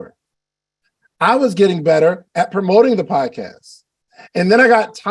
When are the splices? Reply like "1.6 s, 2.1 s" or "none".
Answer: none